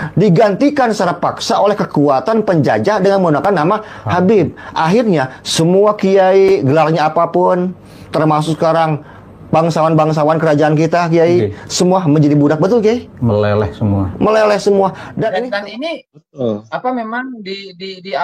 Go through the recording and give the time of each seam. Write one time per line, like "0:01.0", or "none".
0:15.4

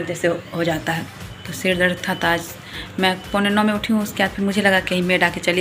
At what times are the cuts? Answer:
none

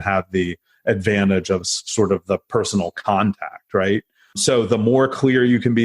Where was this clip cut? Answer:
0:04.4

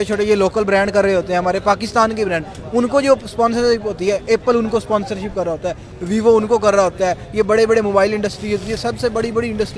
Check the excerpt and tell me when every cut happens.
none

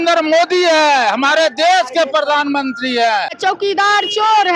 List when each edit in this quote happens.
0:03.4

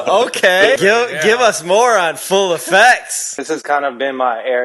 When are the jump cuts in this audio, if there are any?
0:00.8
0:03.3

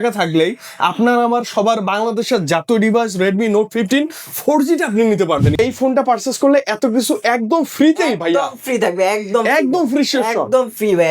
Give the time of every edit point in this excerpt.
0:05.5

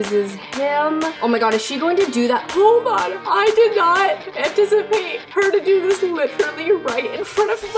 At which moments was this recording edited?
0:02.5
0:03.2

